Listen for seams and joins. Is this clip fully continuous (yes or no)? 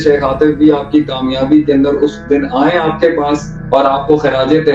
no